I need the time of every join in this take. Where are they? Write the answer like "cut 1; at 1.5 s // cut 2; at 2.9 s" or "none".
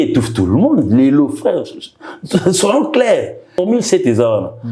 cut 1; at 3.6 s